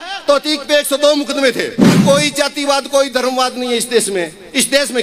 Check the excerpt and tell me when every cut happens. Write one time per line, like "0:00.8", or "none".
0:01.9